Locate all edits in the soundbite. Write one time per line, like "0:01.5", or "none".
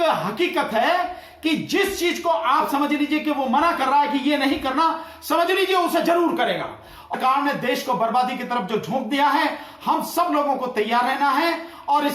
0:07.1